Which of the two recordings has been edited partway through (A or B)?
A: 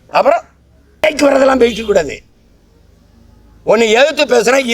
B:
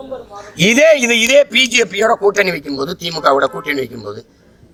A